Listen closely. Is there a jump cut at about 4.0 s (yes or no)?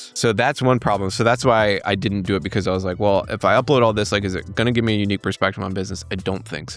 no